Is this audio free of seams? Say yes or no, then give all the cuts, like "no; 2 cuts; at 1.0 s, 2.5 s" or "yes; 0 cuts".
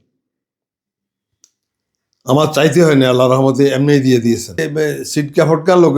no; 1 cut; at 4.7 s